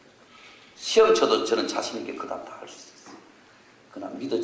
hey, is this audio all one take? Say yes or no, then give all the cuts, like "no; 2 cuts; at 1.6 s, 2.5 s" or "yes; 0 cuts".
yes; 0 cuts